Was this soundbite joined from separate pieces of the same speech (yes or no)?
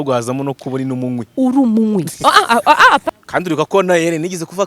yes